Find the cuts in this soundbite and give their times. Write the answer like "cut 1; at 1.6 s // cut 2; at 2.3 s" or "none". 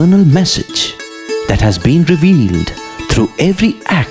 none